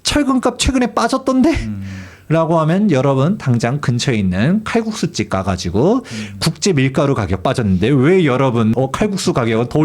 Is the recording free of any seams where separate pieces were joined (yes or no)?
no